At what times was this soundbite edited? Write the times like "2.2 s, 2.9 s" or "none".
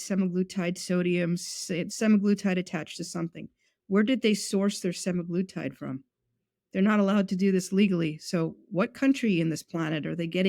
1.8 s